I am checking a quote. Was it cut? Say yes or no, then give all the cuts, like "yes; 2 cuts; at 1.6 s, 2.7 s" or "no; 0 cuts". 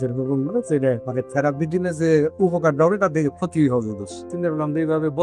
yes; 2 cuts; at 1.0 s, 4.3 s